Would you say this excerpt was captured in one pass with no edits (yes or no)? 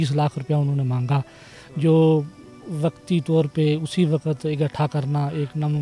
yes